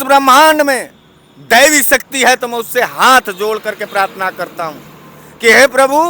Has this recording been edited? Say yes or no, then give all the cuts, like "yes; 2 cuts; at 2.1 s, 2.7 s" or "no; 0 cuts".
no; 0 cuts